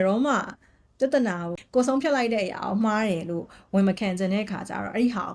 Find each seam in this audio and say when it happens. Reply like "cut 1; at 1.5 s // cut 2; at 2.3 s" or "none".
cut 1; at 1.5 s